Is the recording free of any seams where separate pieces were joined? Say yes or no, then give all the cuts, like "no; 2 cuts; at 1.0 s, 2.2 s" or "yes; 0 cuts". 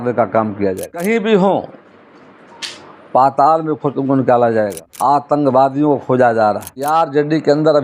no; 3 cuts; at 1.0 s, 4.8 s, 6.9 s